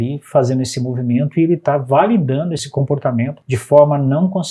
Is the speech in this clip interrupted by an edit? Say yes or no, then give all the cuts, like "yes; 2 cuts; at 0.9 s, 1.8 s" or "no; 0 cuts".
yes; 2 cuts; at 2.7 s, 3.4 s